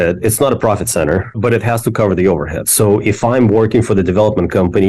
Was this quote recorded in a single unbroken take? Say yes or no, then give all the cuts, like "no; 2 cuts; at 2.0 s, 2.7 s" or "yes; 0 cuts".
no; 1 cut; at 1.3 s